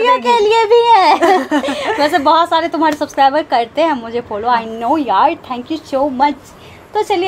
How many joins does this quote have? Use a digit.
0